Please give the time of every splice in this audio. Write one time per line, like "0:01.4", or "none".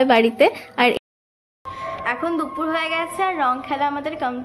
0:00.9